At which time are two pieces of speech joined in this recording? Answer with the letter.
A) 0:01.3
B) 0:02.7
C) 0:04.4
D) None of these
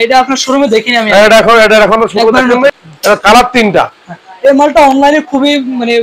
B